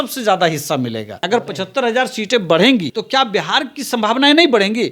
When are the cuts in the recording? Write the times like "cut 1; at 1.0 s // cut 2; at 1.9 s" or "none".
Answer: cut 1; at 1.2 s // cut 2; at 3.0 s